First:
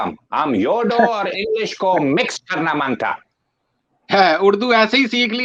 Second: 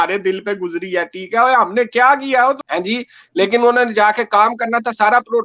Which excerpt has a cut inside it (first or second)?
second